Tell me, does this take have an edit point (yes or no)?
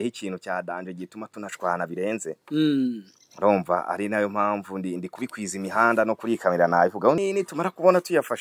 yes